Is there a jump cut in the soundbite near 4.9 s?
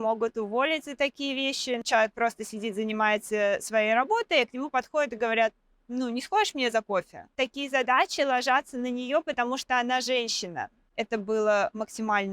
no; 3 cuts; at 1.8 s, 7.3 s, 10.9 s

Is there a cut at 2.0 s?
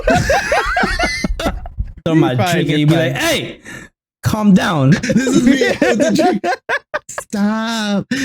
yes; 1 cut; at 2.0 s

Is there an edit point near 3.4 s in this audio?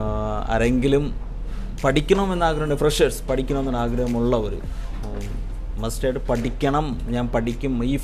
no; 0 cuts

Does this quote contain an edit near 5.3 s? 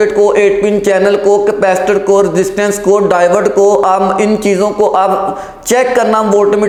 no; 0 cuts

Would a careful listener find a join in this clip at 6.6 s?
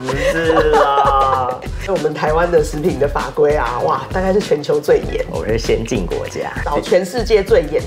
yes; 2 cuts; at 1.9 s, 6.6 s

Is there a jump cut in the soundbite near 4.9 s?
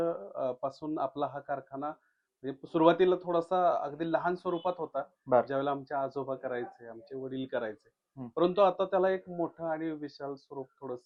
no; 0 cuts

